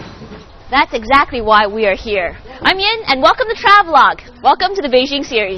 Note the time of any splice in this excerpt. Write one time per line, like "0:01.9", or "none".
none